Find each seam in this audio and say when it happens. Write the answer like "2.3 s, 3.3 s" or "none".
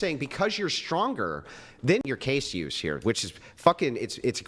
2.1 s